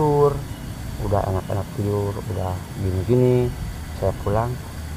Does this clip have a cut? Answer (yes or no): no